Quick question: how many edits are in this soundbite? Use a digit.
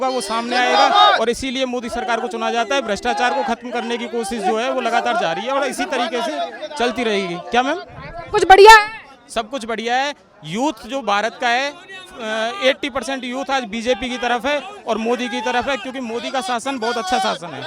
0